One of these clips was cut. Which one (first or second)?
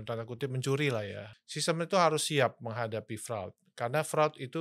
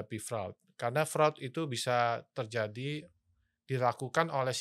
first